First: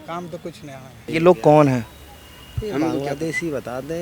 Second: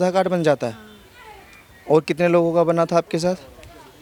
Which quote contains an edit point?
first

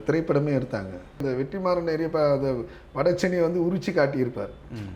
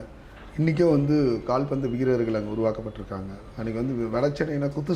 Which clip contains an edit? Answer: first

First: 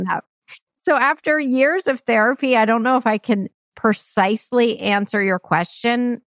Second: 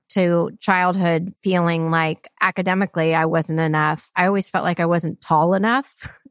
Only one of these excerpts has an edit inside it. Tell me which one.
second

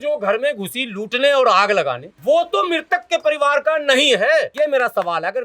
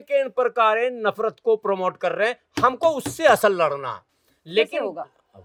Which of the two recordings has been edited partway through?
first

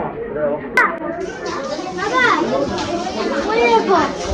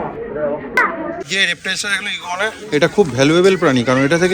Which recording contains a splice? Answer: second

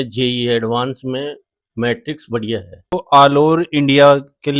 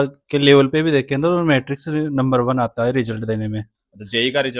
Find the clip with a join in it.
first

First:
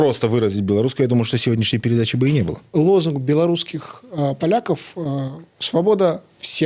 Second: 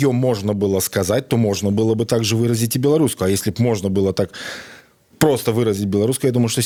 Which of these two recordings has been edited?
first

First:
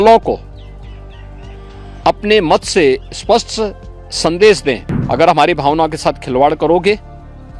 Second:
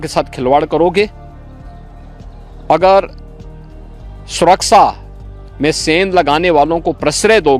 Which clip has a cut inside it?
first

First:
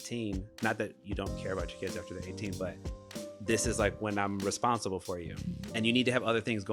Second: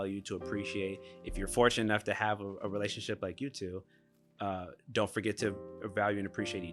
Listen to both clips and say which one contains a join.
first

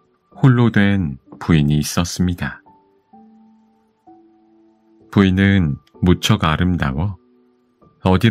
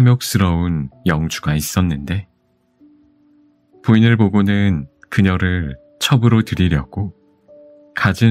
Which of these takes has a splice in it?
second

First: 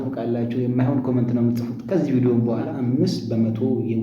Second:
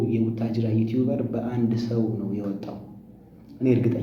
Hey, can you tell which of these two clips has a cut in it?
first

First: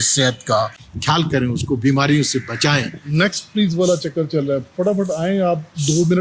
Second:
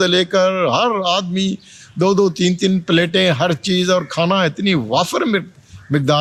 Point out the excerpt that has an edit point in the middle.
first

